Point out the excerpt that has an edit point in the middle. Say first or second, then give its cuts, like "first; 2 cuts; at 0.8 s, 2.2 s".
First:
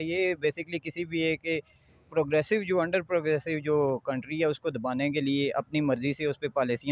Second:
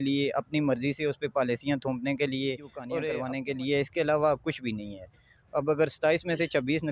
second; 1 cut; at 3.0 s